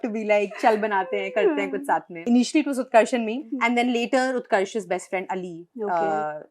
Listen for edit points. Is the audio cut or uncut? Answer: cut